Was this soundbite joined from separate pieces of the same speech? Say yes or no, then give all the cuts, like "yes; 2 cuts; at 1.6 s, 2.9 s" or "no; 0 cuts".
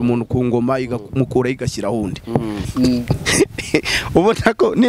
yes; 1 cut; at 2.7 s